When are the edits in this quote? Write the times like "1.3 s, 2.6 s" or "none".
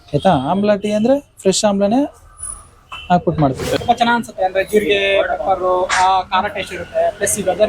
3.8 s